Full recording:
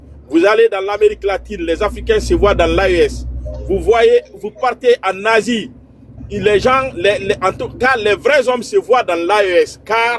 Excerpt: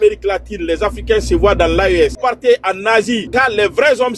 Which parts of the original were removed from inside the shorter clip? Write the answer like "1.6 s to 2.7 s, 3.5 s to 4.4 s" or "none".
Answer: 3.2 s to 4.6 s, 5.6 s to 7.7 s